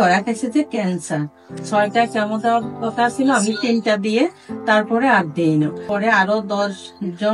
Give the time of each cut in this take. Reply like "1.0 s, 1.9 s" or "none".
1.5 s, 5.8 s